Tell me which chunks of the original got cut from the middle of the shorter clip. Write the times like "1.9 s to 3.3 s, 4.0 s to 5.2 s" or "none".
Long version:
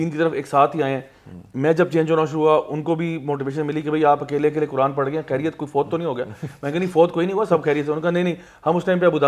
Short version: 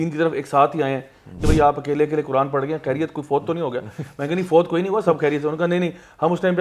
1.3 s to 3.8 s

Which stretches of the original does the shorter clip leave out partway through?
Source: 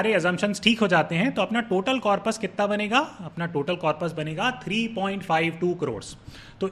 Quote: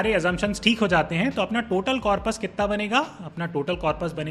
none

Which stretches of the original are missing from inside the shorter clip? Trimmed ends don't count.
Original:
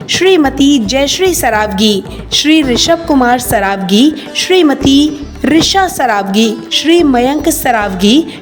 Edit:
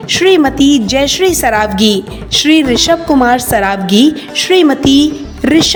none

